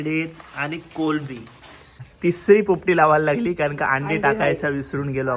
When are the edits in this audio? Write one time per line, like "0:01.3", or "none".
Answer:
0:02.0